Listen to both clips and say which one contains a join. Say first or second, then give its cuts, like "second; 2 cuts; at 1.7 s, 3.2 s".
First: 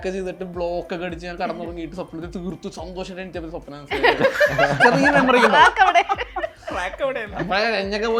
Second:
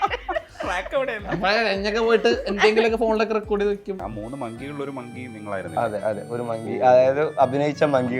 second; 1 cut; at 4.0 s